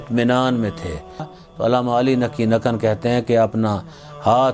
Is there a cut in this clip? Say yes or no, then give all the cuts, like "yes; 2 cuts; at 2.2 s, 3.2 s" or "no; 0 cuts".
yes; 1 cut; at 1.3 s